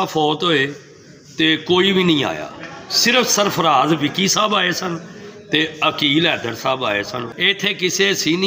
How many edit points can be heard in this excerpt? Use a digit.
1